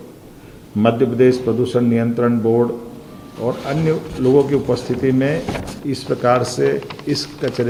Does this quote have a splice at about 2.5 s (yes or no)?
no